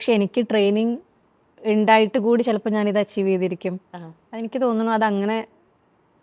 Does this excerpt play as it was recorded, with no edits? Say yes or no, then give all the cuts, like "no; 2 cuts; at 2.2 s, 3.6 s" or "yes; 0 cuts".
yes; 0 cuts